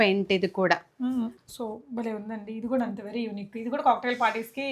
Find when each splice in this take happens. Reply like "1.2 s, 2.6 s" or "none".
1.3 s